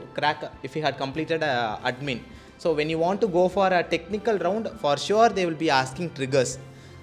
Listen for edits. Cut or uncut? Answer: uncut